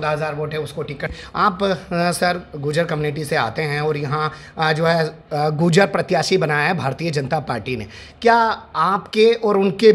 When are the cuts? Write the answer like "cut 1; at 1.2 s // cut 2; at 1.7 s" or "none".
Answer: cut 1; at 1.1 s